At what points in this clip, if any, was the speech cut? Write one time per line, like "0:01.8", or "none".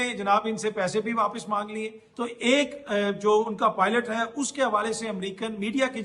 0:02.1